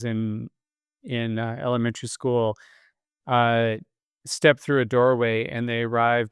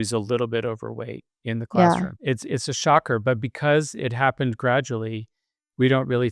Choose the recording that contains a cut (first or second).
second